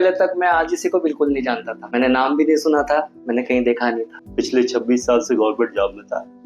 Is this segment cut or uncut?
cut